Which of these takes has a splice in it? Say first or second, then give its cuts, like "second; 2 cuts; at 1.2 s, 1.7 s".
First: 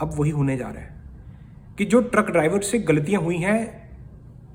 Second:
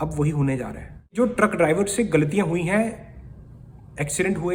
second; 1 cut; at 1.1 s